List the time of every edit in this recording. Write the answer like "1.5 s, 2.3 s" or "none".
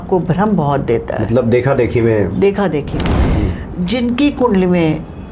3.3 s